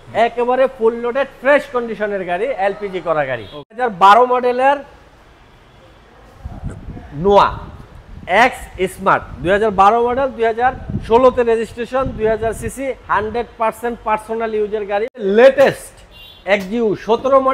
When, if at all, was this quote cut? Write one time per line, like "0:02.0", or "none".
0:03.8
0:15.2